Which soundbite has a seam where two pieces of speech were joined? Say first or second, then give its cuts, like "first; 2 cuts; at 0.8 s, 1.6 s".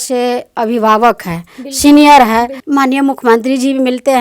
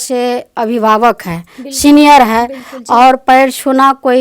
first; 1 cut; at 2.6 s